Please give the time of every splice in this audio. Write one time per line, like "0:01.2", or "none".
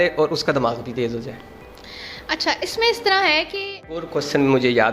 0:04.0